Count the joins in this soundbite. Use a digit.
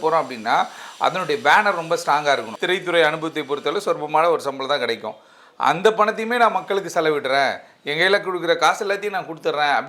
1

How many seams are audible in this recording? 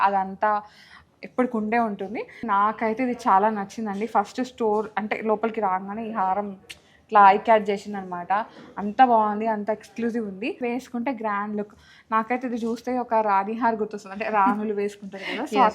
2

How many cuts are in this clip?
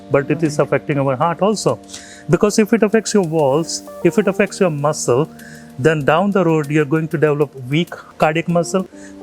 1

